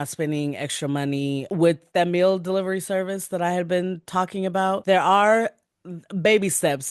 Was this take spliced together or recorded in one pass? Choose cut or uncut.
cut